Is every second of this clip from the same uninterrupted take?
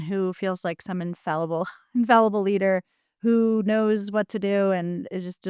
yes; 0 cuts

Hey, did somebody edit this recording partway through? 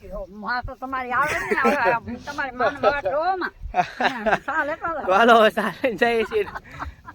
no; 0 cuts

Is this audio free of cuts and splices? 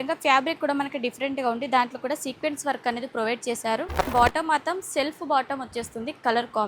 no; 1 cut; at 4.1 s

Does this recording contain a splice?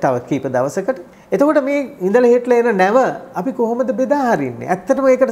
yes; 1 cut; at 1.1 s

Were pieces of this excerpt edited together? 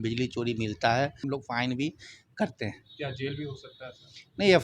yes; 1 cut; at 1.3 s

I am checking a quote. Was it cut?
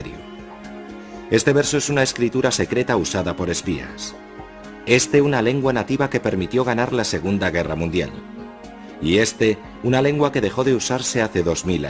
no; 0 cuts

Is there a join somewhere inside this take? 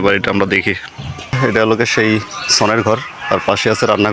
yes; 1 cut; at 1.3 s

